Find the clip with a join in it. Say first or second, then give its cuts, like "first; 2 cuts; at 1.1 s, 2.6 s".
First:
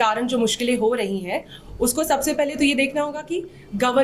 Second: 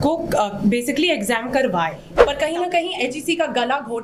second; 1 cut; at 2.1 s